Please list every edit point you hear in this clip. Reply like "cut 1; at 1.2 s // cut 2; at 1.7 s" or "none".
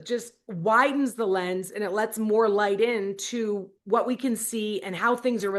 none